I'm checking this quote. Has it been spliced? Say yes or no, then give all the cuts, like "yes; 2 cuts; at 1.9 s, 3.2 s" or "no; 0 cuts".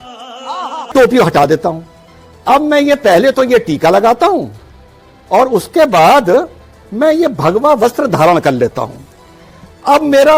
yes; 1 cut; at 0.9 s